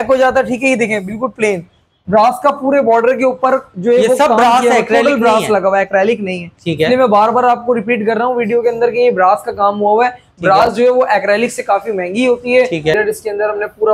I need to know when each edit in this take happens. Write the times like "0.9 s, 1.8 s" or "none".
1.9 s, 12.9 s